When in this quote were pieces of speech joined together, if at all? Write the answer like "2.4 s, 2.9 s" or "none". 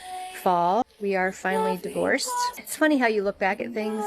0.9 s, 2.6 s